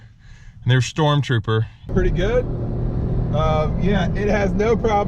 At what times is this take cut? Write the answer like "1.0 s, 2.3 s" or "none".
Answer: 1.9 s